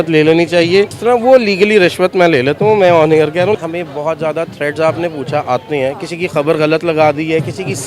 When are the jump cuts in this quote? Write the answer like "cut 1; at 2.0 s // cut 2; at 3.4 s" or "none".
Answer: cut 1; at 1.0 s // cut 2; at 3.6 s